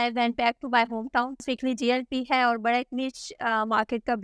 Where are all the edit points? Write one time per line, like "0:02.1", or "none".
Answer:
0:01.4